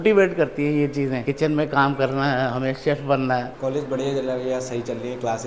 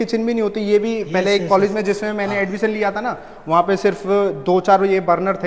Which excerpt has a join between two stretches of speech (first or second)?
first